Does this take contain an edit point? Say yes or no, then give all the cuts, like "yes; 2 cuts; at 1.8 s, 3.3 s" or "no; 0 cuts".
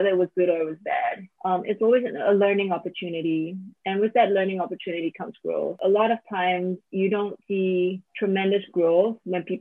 yes; 4 cuts; at 1.3 s, 5.8 s, 6.8 s, 7.6 s